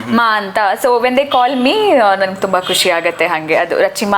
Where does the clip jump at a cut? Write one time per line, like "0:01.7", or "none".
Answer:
none